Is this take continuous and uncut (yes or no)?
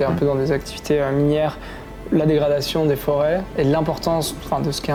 yes